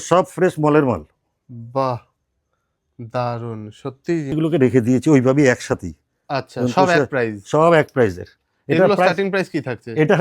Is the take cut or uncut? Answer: cut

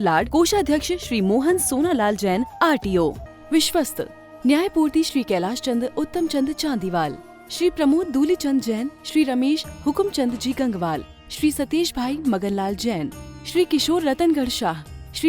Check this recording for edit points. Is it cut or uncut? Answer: cut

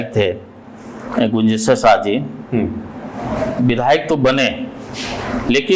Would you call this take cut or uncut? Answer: uncut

